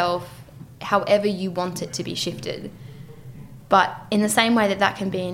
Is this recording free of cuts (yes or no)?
yes